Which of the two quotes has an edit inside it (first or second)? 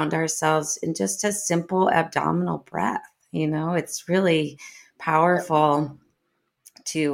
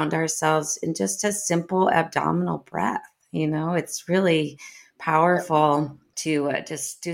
second